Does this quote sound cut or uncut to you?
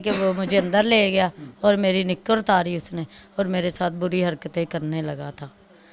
uncut